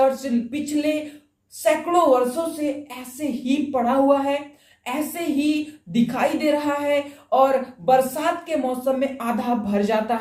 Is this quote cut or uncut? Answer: uncut